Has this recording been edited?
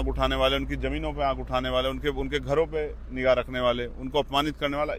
no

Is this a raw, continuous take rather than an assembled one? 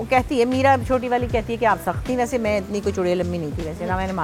yes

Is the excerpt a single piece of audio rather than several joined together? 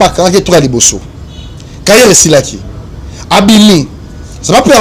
yes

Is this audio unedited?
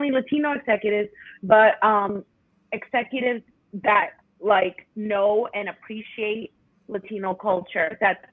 yes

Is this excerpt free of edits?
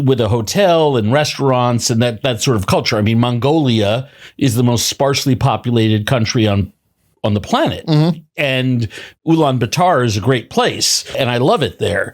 no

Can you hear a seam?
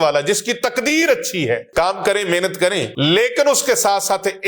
yes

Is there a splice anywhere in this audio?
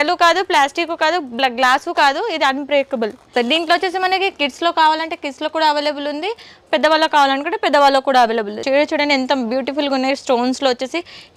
yes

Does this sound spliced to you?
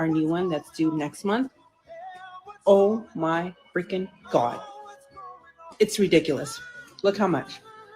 no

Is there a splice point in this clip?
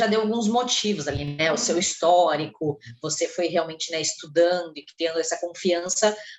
no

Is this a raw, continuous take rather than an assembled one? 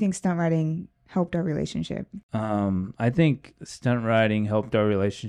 yes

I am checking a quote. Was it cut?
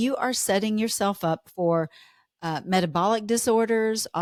no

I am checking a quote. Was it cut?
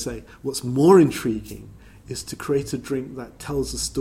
no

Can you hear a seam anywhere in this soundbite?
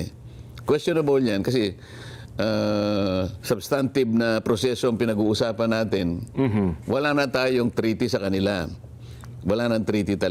no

